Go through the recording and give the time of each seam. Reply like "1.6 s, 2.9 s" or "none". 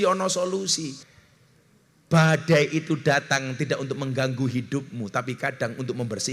1.1 s